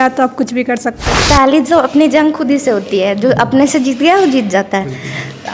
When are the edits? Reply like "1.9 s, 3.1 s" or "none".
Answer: 1.1 s